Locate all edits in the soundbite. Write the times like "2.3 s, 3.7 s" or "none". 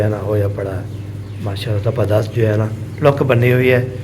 none